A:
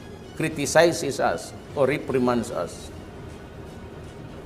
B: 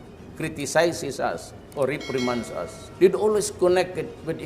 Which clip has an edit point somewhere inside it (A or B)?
B